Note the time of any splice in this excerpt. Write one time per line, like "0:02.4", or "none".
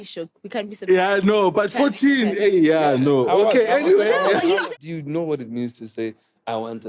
0:04.6